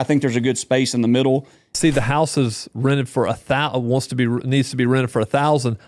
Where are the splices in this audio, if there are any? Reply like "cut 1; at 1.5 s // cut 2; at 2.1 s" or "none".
cut 1; at 1.7 s

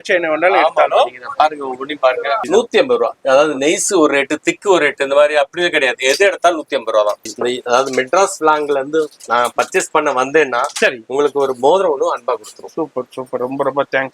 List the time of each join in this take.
cut 1; at 2.4 s // cut 2; at 7.3 s

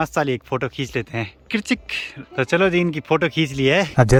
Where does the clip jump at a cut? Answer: none

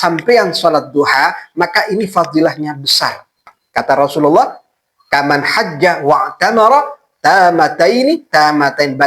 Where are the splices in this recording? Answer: cut 1; at 3.6 s

